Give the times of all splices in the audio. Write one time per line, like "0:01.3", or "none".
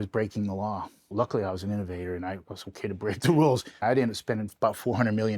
0:01.0
0:03.8